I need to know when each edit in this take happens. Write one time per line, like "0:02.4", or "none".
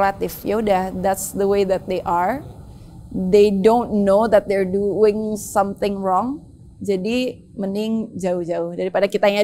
none